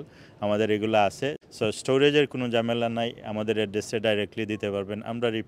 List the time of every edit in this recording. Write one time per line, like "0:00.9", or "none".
0:01.4